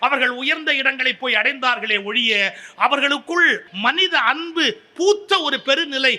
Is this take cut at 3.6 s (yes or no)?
yes